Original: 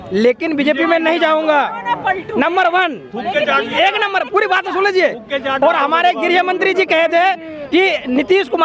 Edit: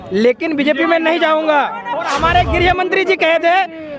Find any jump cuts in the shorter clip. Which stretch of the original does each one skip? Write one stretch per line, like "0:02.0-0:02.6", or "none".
0:02.1-0:05.8